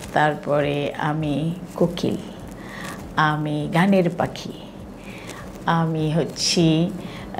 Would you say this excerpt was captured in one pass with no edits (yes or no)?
yes